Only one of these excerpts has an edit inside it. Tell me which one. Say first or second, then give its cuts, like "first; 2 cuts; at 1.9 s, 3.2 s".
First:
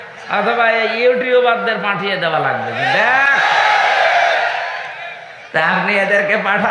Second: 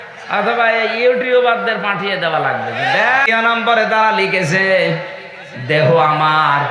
second; 1 cut; at 3.3 s